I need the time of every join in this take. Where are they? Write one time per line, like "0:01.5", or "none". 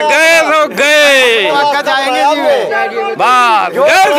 none